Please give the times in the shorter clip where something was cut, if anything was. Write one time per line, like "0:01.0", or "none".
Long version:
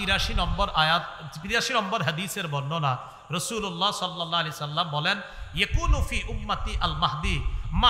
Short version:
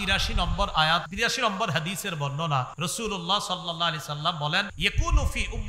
0:01.1
0:02.7
0:04.7